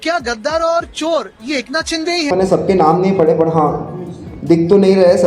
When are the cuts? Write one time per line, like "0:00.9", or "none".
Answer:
0:02.3

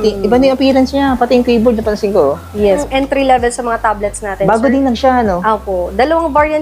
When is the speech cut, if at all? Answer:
0:02.8

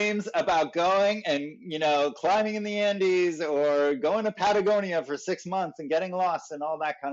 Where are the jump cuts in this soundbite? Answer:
none

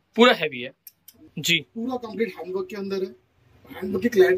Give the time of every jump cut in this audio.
0:01.2

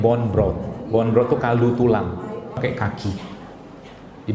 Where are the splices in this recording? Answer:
0:02.6

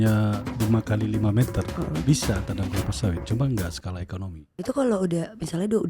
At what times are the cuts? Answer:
0:01.7
0:04.4

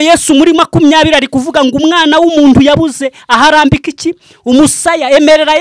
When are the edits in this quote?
none

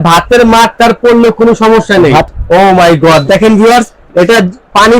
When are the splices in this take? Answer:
0:02.3

